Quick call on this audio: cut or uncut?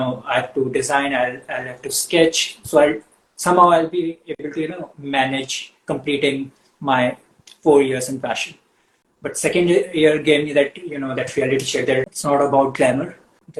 uncut